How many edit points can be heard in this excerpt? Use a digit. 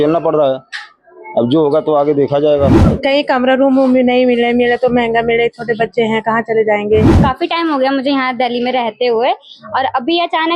2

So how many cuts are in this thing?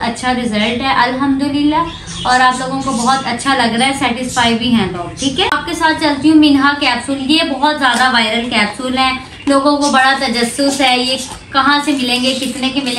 1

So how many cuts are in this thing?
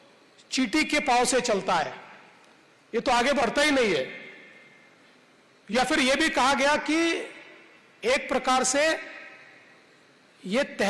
0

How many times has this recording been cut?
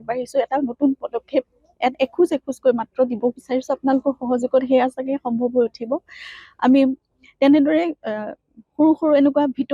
0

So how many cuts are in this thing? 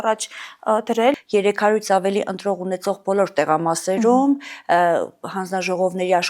1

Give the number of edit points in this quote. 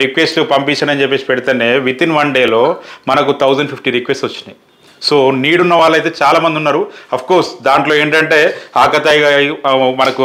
0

